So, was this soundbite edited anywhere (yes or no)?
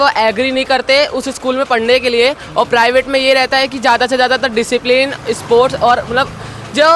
no